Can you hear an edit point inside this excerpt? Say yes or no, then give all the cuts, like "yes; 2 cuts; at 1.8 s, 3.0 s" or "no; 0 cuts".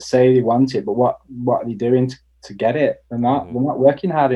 no; 0 cuts